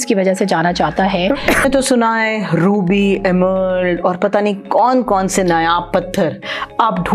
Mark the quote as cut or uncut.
cut